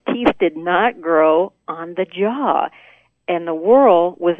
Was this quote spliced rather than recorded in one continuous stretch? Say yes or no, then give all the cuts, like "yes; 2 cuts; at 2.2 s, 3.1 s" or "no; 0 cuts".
yes; 1 cut; at 3.2 s